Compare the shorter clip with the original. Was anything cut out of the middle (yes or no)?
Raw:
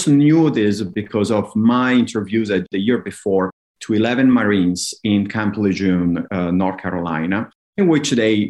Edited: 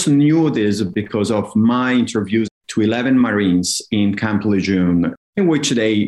yes